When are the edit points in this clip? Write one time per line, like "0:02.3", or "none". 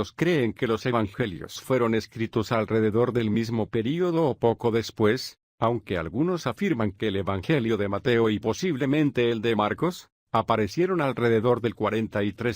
0:02.1